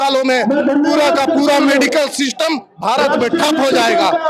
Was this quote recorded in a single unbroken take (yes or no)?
yes